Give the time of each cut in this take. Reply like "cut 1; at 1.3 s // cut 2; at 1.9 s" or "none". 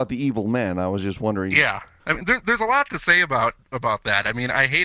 cut 1; at 1.9 s